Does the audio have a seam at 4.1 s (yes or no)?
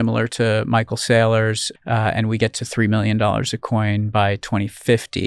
no